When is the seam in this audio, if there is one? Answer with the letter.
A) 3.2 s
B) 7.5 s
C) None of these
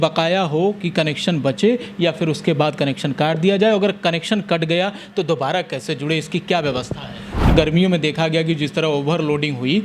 B